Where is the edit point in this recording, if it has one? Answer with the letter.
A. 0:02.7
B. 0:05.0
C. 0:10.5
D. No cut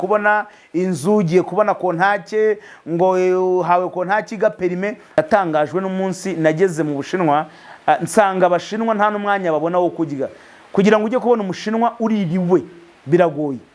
B